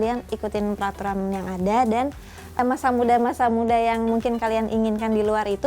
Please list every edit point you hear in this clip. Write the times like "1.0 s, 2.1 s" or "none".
2.6 s